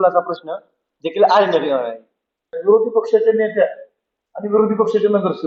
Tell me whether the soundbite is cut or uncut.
cut